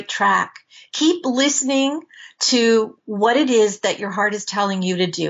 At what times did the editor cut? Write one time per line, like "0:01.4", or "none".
0:03.0